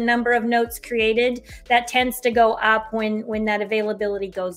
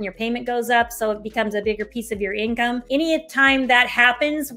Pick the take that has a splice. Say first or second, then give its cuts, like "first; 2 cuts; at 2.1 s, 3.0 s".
second; 1 cut; at 2.8 s